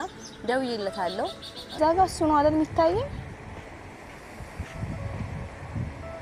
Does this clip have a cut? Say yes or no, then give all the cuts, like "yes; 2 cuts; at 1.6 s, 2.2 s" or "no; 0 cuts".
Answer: yes; 1 cut; at 1.8 s